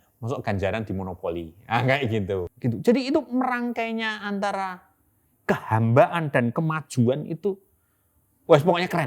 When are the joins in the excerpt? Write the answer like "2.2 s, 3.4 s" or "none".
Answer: 2.5 s